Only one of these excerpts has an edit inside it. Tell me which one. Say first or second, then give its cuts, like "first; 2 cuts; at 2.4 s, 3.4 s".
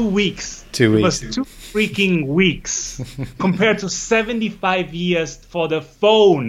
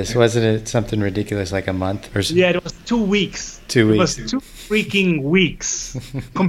second; 1 cut; at 2.0 s